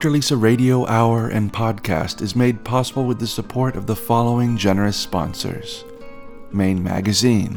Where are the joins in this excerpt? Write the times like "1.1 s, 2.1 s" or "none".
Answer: none

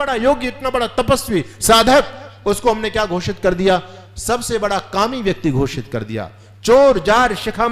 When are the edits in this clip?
none

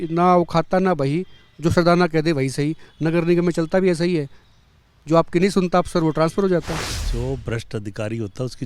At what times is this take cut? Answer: 7.0 s

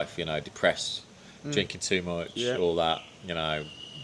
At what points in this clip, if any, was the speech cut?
none

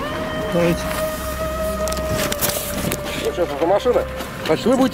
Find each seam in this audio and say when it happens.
none

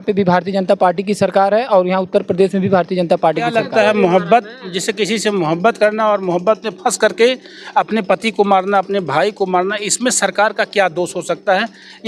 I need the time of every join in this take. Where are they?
3.5 s

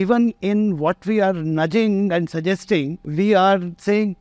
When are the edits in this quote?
3.0 s

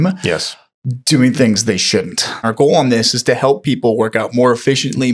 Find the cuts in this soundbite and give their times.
2.5 s

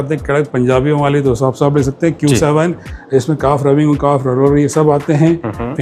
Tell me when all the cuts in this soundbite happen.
none

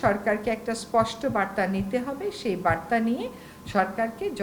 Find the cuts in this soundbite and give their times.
none

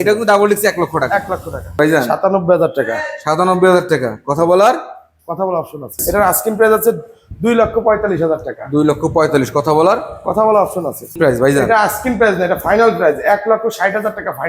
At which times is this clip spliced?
1.8 s, 6.0 s, 11.2 s

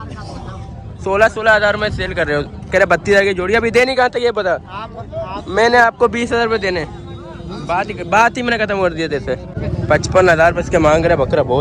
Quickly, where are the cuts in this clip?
9.6 s

